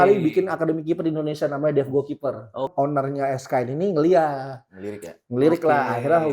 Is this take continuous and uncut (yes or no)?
no